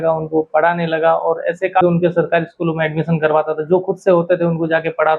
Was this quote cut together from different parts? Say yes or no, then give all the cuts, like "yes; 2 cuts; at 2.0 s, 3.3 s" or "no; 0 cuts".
yes; 1 cut; at 1.8 s